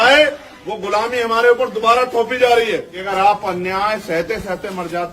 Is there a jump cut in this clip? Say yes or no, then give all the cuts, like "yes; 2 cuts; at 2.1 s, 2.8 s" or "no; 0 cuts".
yes; 1 cut; at 3.0 s